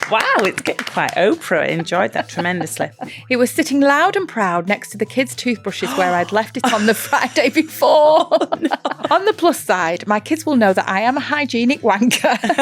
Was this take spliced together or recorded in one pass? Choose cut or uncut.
cut